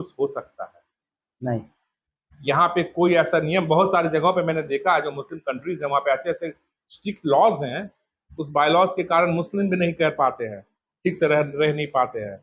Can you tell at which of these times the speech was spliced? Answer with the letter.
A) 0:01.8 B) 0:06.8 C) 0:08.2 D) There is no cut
D